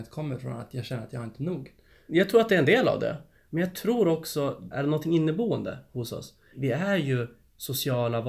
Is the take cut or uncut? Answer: cut